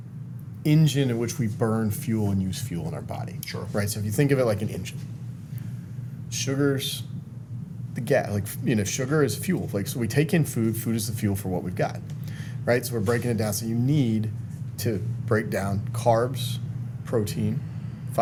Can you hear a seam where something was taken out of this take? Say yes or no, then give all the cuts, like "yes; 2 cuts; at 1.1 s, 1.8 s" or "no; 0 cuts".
no; 0 cuts